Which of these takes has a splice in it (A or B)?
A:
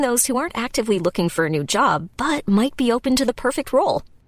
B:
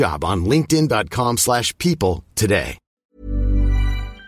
B